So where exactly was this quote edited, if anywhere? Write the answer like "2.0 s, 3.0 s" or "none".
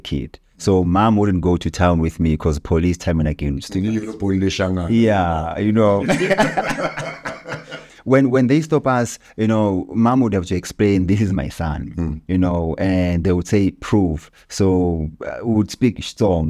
7.8 s